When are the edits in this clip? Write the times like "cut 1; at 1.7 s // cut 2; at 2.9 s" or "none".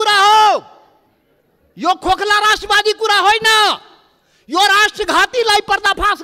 none